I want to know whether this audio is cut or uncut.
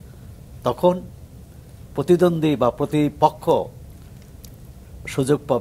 uncut